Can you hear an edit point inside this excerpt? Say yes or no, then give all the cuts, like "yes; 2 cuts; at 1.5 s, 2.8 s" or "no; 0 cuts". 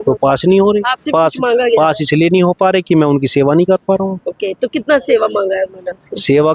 no; 0 cuts